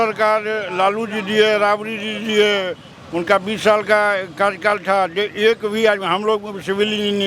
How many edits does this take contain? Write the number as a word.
zero